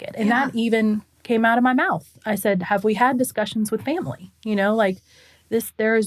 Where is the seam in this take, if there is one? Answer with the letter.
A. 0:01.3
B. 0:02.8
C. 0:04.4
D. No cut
D